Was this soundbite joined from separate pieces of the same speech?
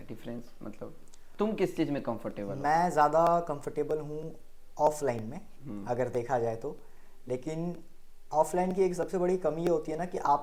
no; 0 cuts

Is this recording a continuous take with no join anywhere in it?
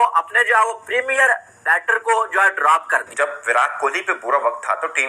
no; 1 cut; at 3.1 s

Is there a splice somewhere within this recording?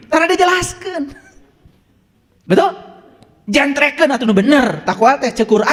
no; 0 cuts

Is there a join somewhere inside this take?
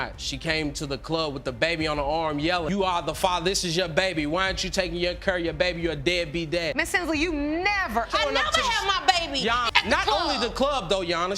no; 0 cuts

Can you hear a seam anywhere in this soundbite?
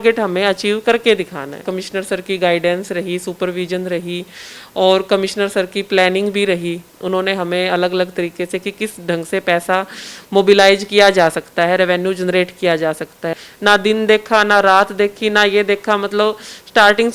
yes; 2 cuts; at 1.7 s, 13.4 s

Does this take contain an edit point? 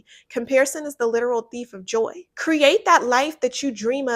yes; 1 cut; at 2.3 s

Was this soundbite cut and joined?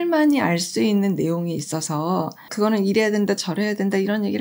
yes; 1 cut; at 2.4 s

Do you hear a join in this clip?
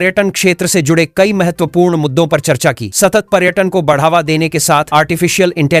no; 0 cuts

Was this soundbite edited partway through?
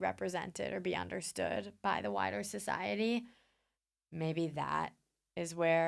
no; 0 cuts

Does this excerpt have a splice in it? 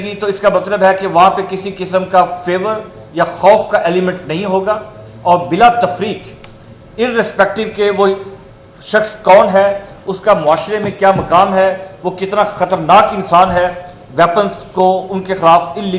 no; 0 cuts

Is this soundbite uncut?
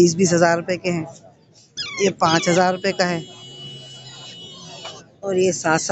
yes; 0 cuts

